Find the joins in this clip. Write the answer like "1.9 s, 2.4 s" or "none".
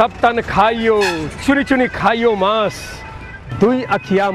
none